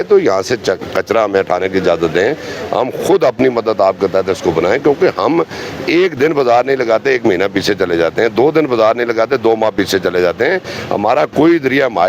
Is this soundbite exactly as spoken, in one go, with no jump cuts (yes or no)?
yes